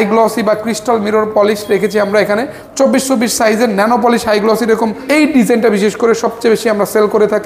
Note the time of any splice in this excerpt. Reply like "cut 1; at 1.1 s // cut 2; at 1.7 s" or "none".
cut 1; at 2.7 s // cut 2; at 5.0 s